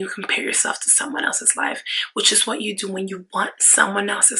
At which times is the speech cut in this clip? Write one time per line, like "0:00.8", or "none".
none